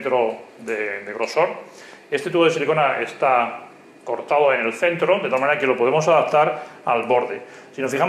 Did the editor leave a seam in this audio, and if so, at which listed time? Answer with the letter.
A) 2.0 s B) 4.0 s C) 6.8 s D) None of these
D